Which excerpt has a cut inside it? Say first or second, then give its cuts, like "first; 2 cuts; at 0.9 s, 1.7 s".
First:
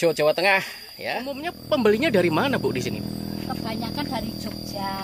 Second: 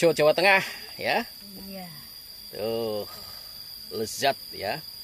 first; 1 cut; at 1.3 s